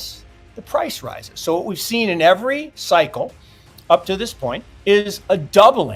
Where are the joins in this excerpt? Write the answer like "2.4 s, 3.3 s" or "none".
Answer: 4.7 s